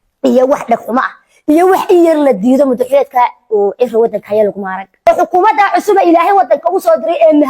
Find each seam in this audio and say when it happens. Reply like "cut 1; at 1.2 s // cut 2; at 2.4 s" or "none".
cut 1; at 5.0 s